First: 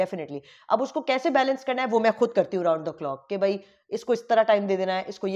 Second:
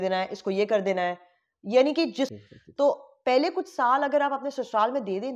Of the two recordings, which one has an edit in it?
second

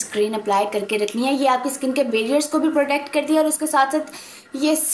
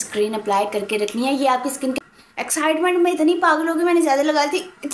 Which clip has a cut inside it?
second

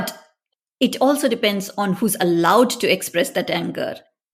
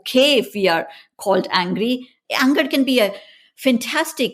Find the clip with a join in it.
second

